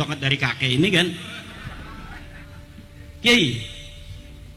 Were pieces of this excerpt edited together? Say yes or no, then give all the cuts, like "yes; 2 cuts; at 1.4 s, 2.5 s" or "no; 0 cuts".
no; 0 cuts